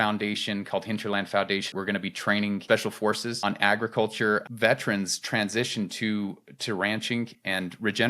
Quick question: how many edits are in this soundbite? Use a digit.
1